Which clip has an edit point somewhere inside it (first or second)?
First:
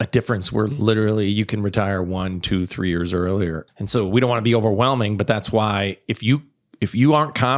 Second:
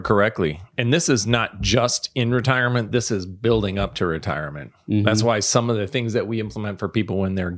first